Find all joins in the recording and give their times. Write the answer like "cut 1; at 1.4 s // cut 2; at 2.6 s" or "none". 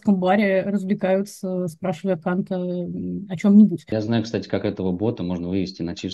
cut 1; at 4.0 s